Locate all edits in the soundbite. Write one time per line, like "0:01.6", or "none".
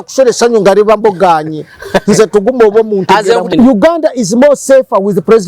0:03.5